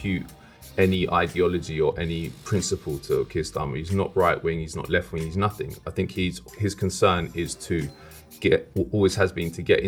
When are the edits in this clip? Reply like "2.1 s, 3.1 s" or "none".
none